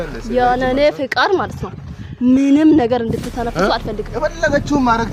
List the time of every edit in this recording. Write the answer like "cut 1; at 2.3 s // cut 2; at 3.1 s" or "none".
none